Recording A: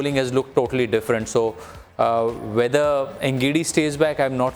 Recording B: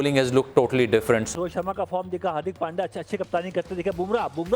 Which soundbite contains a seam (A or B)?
B